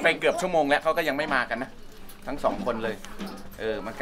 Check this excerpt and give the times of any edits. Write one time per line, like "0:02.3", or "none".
none